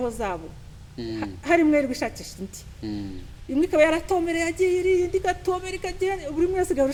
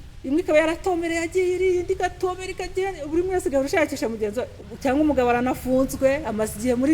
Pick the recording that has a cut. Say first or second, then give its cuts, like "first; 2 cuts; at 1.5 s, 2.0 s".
second; 1 cut; at 4.6 s